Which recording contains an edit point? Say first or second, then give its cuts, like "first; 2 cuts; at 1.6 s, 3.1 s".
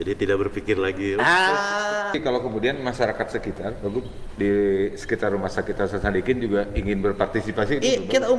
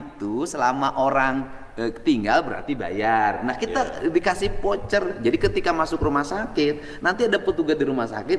first; 1 cut; at 2.2 s